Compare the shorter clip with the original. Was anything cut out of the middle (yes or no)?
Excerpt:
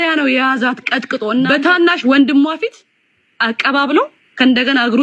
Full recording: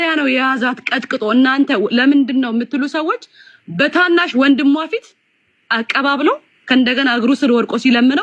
yes